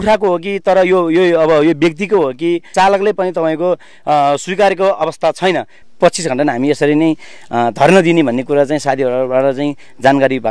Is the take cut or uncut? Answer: cut